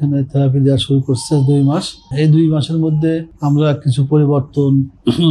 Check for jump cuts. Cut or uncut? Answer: cut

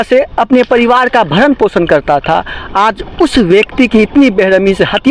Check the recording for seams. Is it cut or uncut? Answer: uncut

